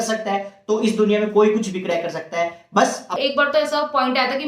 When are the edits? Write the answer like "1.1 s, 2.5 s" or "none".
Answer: 3.1 s